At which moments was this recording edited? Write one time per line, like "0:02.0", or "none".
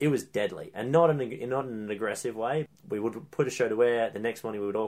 0:02.7